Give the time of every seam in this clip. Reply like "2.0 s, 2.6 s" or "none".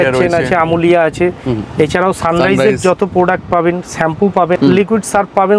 4.6 s